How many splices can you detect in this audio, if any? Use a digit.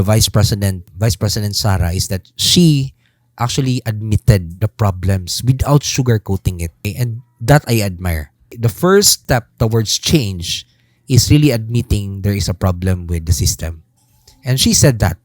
5